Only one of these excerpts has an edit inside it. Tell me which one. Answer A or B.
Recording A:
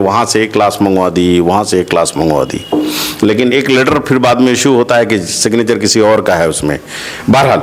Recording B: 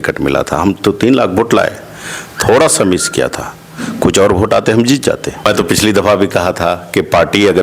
B